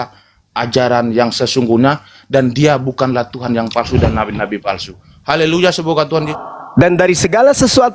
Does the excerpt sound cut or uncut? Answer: cut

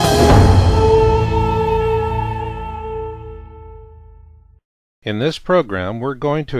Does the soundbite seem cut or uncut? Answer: cut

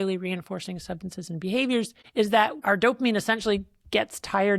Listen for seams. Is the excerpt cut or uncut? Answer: cut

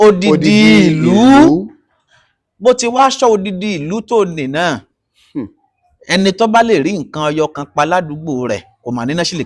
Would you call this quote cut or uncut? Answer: uncut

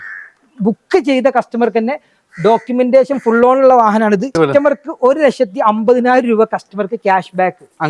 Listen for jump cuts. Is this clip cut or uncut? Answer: cut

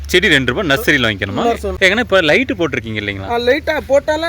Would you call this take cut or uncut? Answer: cut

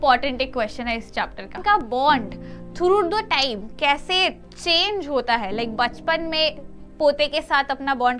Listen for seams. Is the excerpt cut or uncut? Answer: cut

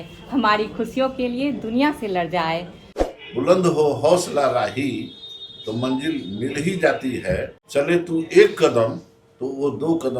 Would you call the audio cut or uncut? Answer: cut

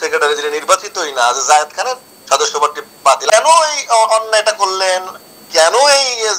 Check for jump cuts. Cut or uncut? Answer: cut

